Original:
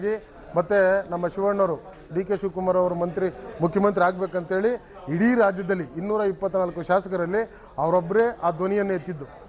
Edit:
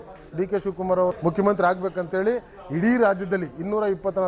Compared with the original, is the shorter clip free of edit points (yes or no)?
no